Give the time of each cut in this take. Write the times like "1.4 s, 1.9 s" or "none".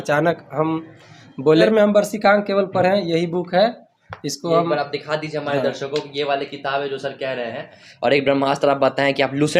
1.6 s, 7.8 s